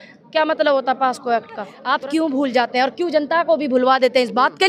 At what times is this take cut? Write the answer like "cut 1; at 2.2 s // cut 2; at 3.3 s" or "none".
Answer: cut 1; at 1.8 s